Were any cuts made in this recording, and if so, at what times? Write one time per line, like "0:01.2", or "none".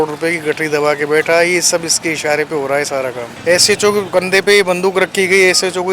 0:03.3